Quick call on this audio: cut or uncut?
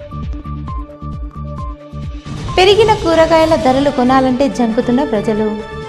cut